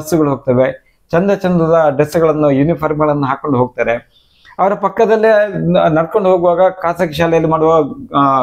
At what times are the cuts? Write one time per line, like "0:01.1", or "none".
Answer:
none